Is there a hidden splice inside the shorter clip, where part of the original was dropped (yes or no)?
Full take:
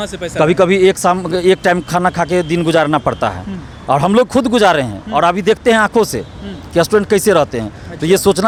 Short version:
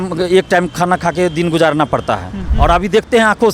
yes